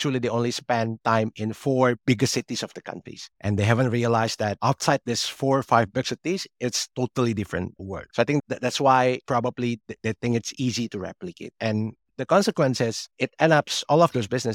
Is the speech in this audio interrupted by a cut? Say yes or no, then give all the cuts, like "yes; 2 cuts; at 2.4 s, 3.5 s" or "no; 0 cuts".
no; 0 cuts